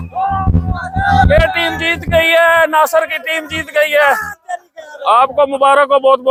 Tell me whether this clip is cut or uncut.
uncut